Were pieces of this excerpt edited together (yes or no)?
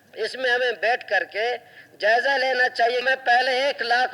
yes